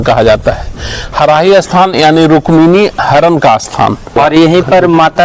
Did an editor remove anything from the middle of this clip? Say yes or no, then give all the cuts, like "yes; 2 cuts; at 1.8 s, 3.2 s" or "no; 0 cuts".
yes; 1 cut; at 4.2 s